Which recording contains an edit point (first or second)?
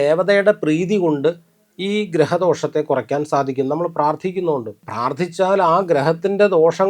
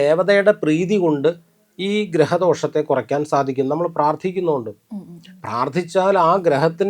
first